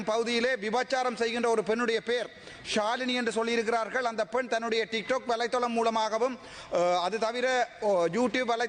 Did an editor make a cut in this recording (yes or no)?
no